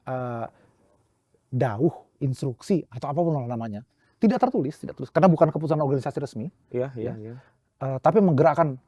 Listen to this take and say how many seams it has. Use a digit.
0